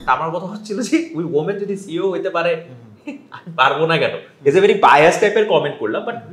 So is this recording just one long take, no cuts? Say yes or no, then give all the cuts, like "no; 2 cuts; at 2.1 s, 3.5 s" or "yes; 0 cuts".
yes; 0 cuts